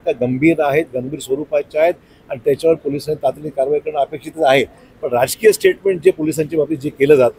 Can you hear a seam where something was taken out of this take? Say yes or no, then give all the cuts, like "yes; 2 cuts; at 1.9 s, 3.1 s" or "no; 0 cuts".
no; 0 cuts